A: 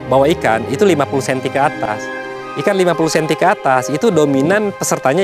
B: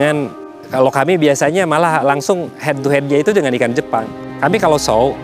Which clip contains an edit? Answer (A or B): B